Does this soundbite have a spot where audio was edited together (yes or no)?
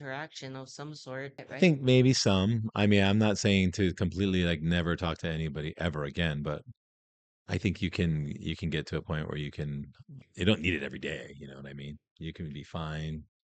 yes